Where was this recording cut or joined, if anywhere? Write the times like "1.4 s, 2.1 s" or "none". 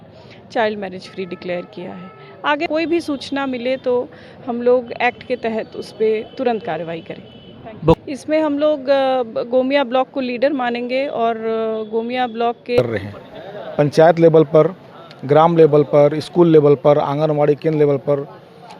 2.7 s, 8.0 s, 12.8 s